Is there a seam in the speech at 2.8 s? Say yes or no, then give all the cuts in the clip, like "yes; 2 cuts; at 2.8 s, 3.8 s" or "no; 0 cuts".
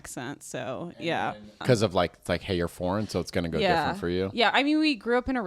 no; 1 cut; at 1.2 s